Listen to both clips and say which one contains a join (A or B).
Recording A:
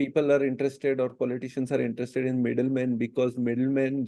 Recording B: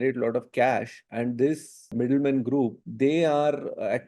B